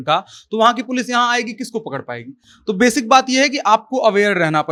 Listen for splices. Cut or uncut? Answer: uncut